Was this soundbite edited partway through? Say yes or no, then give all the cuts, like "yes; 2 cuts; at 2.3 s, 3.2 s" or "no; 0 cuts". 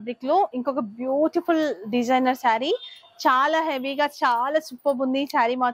no; 0 cuts